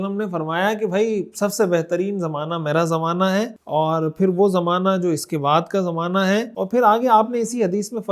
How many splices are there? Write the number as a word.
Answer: two